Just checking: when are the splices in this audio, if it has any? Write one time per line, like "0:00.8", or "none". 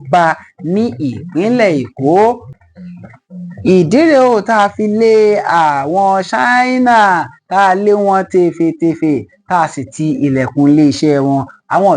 0:02.5

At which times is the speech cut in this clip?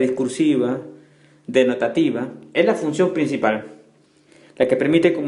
0:03.5

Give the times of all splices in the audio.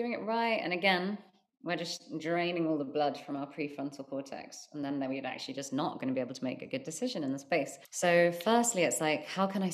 0:07.8

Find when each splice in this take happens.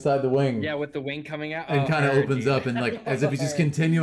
none

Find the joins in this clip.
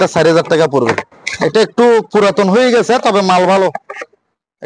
0:01.1

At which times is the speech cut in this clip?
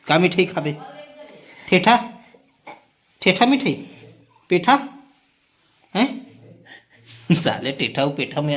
none

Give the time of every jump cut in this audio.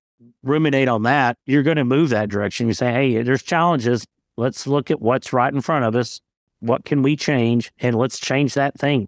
0:07.8

